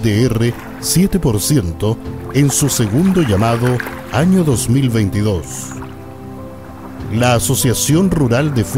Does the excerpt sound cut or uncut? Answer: uncut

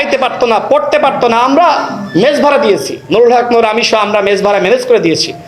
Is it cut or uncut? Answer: uncut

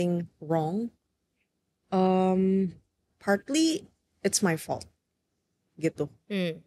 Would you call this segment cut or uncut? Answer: uncut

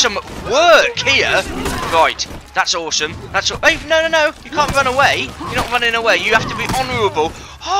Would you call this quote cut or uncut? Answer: uncut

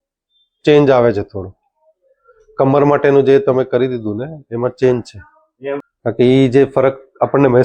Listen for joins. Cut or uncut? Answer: cut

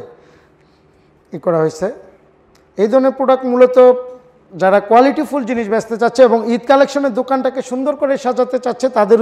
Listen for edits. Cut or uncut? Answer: uncut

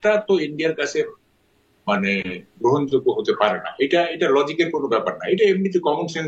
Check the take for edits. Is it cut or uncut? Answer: uncut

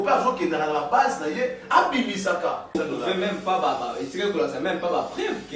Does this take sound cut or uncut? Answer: cut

